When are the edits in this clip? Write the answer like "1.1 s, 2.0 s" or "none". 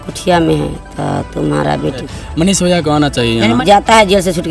2.1 s, 3.6 s